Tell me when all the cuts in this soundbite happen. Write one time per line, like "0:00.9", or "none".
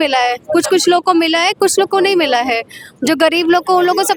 none